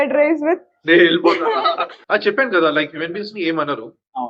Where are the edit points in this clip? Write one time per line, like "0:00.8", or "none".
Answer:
0:01.9